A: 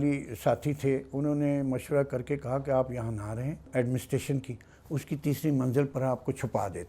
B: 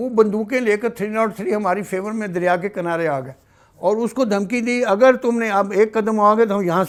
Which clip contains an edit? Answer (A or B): A